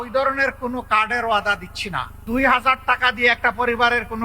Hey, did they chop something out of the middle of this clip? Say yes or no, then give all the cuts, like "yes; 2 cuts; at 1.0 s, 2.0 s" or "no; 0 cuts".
yes; 1 cut; at 2.1 s